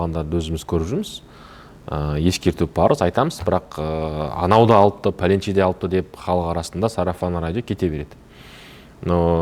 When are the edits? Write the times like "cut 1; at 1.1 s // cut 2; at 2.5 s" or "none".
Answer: none

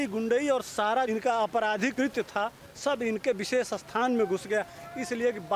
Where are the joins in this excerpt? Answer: cut 1; at 1.1 s

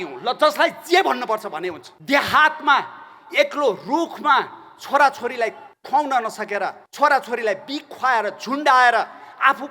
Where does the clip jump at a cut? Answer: cut 1; at 1.9 s // cut 2; at 5.7 s // cut 3; at 6.8 s

